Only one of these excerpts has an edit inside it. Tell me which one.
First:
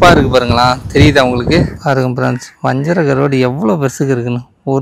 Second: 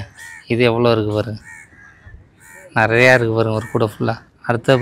first; 1 cut; at 1.7 s

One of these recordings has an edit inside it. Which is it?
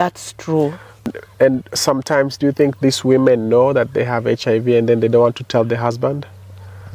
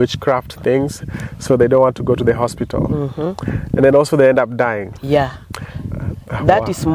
first; 1 cut; at 1.1 s

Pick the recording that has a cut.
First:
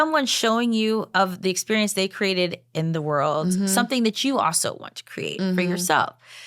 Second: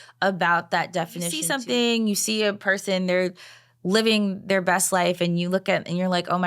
second; 1 cut; at 1.5 s

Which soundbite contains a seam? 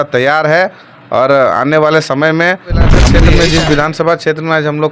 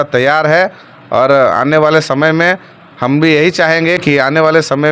first; 1 cut; at 3.1 s

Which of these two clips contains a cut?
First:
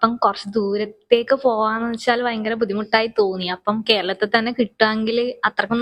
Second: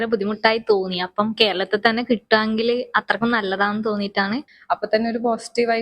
second; 1 cut; at 4.5 s

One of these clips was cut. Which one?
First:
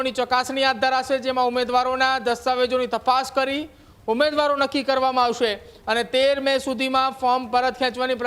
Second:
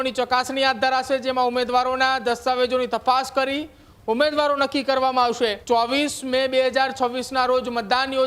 second; 1 cut; at 5.6 s

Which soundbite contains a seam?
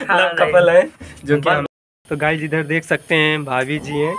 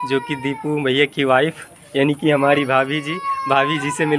first; 1 cut; at 1.6 s

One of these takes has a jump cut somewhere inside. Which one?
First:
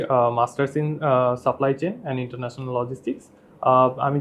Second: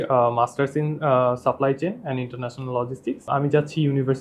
second; 1 cut; at 3.2 s

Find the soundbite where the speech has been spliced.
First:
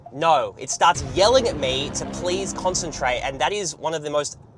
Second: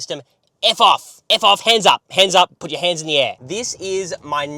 second; 1 cut; at 3.4 s

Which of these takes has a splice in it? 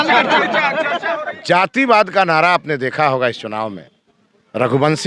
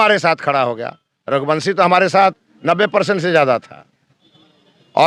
first; 1 cut; at 1.4 s

